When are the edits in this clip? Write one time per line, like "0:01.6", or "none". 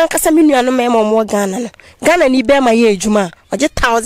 none